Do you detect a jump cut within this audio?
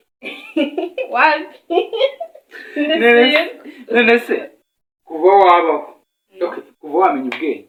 no; 0 cuts

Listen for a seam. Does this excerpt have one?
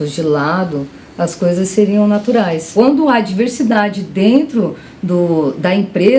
yes; 1 cut; at 2.6 s

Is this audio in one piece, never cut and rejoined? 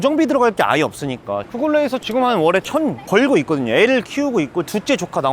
yes; 0 cuts

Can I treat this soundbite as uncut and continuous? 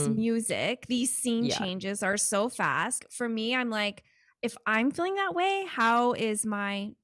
no; 1 cut; at 3.0 s

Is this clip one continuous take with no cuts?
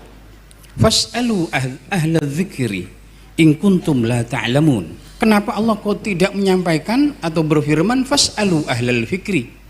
no; 1 cut; at 5.0 s

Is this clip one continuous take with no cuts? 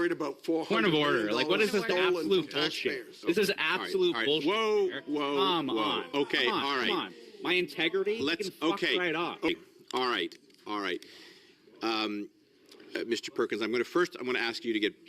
no; 1 cut; at 9.5 s

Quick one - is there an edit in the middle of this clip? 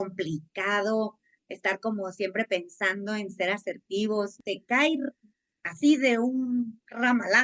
yes; 1 cut; at 4.4 s

